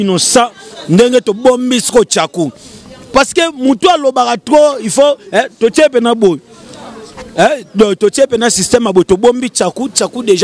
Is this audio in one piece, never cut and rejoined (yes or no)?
yes